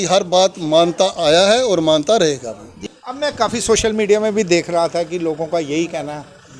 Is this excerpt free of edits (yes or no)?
no